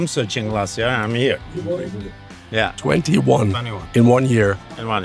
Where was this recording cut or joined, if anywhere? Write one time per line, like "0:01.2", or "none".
none